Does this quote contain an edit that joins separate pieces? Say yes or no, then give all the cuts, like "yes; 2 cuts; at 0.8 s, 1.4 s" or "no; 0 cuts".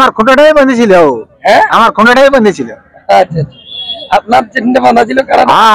no; 0 cuts